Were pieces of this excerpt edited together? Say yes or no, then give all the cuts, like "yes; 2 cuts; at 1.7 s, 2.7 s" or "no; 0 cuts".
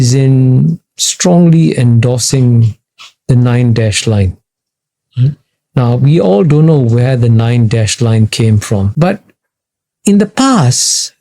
yes; 1 cut; at 8.9 s